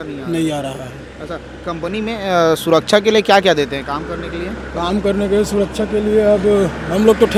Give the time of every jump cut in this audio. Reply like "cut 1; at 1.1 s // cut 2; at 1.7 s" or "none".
none